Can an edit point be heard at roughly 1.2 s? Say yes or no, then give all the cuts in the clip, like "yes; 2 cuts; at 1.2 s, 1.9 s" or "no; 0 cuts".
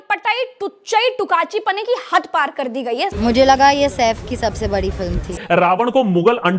no; 2 cuts; at 3.1 s, 5.4 s